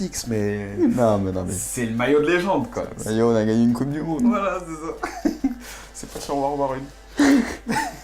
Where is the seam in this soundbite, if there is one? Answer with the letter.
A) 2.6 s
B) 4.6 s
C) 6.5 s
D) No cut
A